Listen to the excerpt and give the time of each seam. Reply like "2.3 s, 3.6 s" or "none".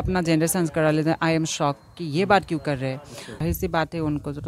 3.4 s